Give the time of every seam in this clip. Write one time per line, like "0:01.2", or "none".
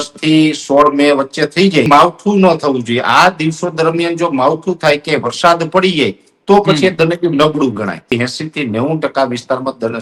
0:01.9
0:08.1